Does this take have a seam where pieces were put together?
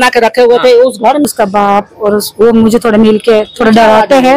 yes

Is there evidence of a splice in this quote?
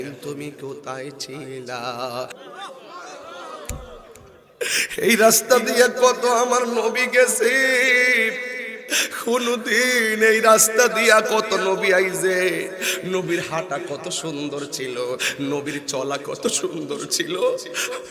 yes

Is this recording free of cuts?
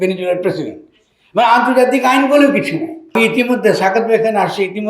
no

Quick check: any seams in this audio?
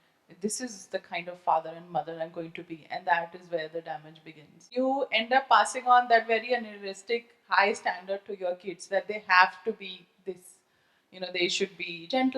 yes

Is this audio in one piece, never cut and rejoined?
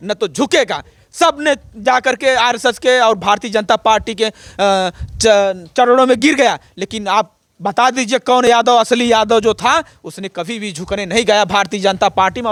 yes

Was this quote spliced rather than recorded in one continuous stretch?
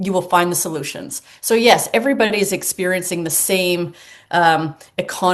no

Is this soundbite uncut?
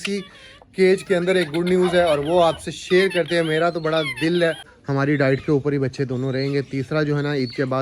no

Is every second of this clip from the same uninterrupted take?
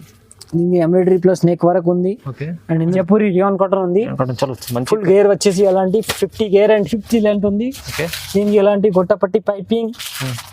no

